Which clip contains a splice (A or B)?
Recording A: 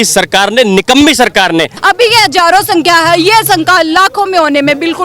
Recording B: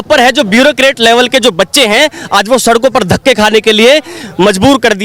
A